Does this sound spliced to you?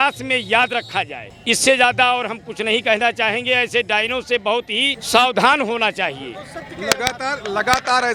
no; 0 cuts

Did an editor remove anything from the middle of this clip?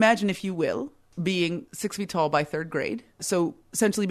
yes; 3 cuts; at 1.0 s, 1.7 s, 3.2 s

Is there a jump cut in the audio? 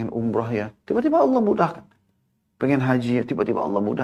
no; 0 cuts

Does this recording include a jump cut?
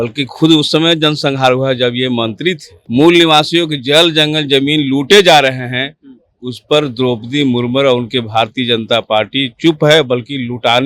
yes; 1 cut; at 2.7 s

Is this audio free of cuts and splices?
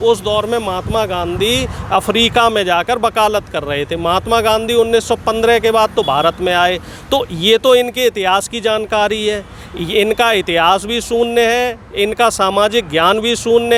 yes; 0 cuts

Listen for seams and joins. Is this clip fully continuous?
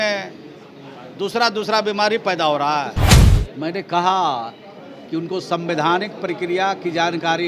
no; 1 cut; at 3.2 s

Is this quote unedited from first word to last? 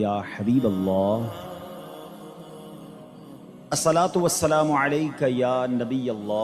no; 2 cuts; at 1.9 s, 3.7 s

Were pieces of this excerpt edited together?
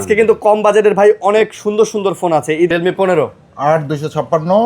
yes; 1 cut; at 2.7 s

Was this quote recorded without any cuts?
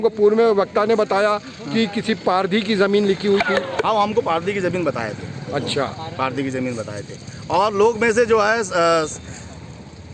yes; 0 cuts

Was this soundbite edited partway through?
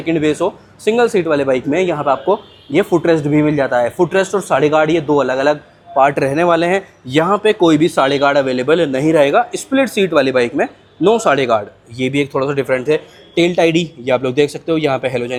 no; 0 cuts

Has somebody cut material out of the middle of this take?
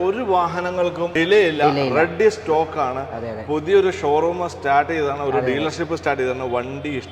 yes; 1 cut; at 1.1 s

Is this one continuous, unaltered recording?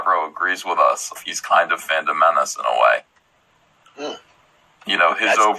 no; 1 cut; at 1.1 s

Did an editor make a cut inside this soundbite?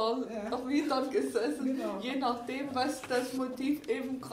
no; 0 cuts

